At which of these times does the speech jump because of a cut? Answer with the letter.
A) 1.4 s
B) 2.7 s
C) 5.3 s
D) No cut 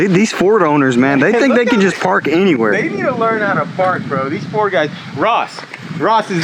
D